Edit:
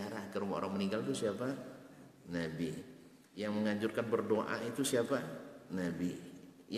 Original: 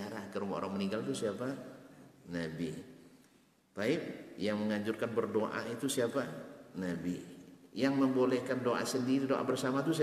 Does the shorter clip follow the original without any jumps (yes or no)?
no